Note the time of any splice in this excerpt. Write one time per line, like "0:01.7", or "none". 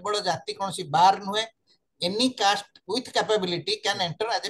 none